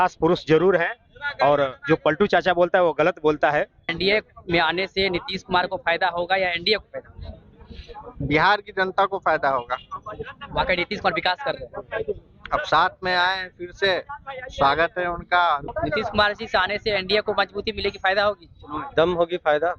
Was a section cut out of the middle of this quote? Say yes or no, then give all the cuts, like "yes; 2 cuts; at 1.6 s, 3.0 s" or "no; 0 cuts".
yes; 2 cuts; at 3.8 s, 15.7 s